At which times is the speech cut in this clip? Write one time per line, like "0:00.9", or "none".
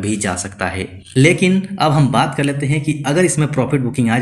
0:01.0